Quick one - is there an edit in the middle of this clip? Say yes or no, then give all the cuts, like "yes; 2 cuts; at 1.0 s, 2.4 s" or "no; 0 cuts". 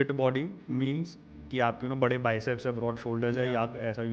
no; 0 cuts